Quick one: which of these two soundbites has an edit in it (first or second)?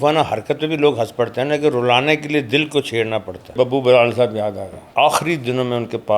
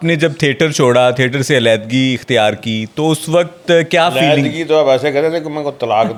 first